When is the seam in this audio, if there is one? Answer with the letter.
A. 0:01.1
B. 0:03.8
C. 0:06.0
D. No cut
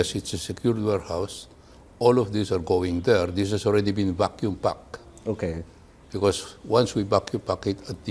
A